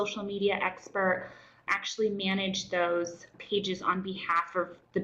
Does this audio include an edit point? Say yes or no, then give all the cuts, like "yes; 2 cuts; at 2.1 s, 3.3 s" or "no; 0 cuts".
yes; 2 cuts; at 1.6 s, 3.3 s